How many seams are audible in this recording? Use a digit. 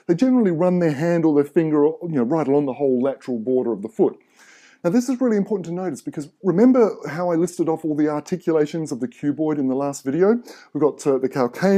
1